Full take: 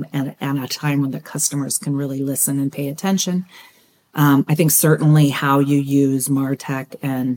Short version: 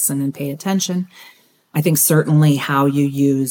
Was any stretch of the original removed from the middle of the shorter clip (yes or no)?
yes